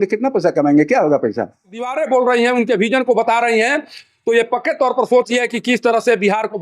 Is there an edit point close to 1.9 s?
yes; 1 cut; at 1.9 s

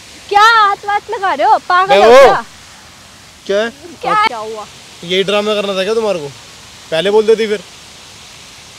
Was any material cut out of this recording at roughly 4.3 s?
yes; 1 cut; at 4.3 s

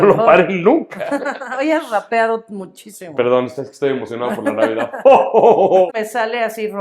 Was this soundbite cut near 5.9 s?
yes; 1 cut; at 5.9 s

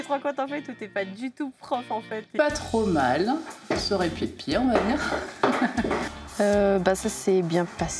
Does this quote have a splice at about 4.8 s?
no; 2 cuts; at 2.3 s, 6.1 s

